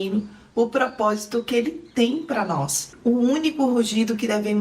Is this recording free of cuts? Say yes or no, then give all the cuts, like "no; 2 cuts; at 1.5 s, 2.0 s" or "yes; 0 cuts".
no; 1 cut; at 2.8 s